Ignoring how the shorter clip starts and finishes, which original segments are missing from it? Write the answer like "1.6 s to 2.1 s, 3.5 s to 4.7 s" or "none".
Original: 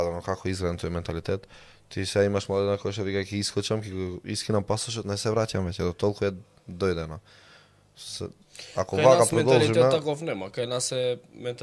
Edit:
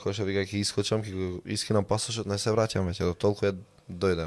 none